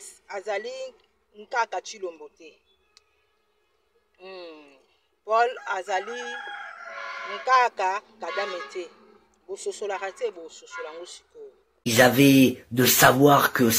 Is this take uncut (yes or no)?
no